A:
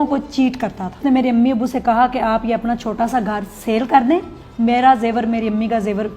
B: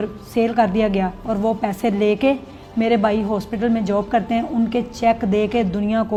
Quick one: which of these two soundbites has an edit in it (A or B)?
A